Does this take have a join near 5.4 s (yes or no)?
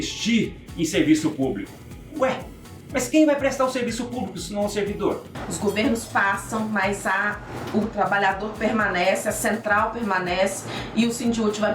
yes